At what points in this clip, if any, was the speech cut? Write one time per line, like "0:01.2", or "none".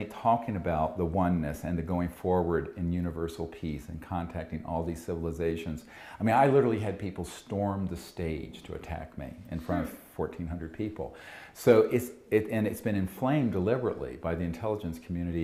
none